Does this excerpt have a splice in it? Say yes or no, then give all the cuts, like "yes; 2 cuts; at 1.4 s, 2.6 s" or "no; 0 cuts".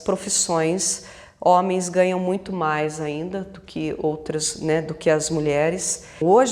no; 0 cuts